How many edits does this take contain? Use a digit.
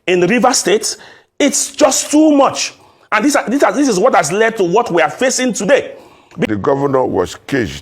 1